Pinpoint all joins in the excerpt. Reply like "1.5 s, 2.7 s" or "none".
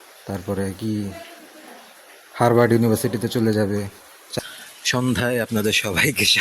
4.3 s